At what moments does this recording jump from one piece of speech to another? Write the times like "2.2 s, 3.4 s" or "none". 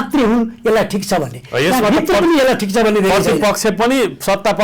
none